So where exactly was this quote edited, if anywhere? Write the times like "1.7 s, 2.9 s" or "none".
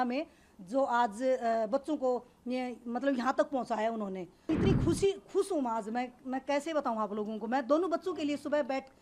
4.5 s